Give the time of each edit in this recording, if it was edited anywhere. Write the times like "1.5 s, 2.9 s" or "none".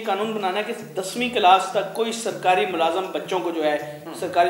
none